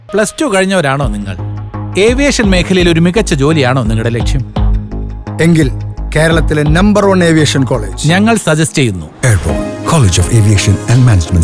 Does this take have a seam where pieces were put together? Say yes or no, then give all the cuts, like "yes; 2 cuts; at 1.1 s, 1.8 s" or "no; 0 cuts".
no; 0 cuts